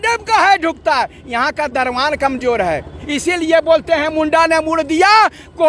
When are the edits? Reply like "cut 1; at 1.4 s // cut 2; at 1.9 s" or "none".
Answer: cut 1; at 3.0 s